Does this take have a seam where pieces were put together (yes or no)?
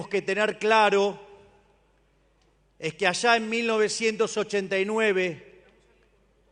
no